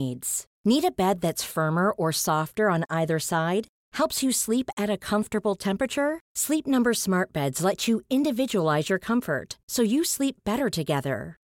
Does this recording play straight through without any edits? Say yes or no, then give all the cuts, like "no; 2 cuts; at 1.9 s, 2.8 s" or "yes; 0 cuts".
yes; 0 cuts